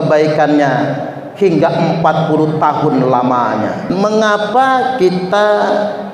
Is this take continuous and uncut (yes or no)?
no